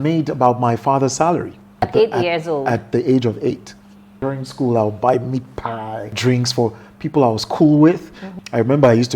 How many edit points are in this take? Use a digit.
4